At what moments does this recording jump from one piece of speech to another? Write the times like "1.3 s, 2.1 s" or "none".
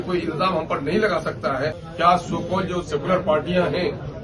1.8 s